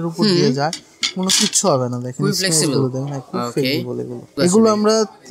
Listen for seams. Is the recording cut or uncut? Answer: cut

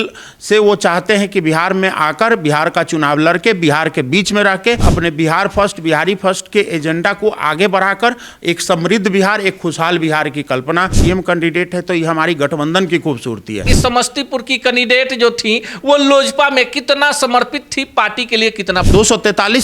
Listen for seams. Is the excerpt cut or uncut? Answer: cut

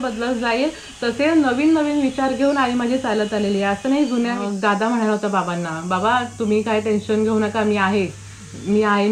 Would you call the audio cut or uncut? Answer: cut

